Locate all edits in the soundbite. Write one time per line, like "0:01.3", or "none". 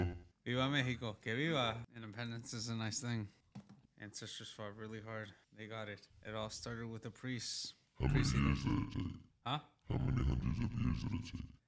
0:02.0